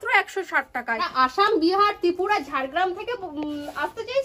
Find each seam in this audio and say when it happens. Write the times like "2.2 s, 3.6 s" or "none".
1.1 s